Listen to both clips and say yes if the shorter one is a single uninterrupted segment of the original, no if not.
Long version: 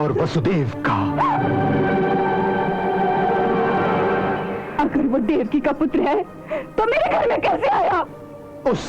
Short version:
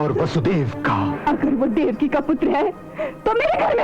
no